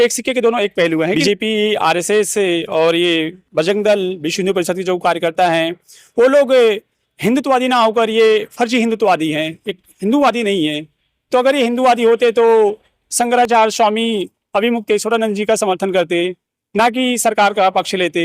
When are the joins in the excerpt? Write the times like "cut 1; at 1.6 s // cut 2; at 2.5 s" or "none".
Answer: cut 1; at 1.2 s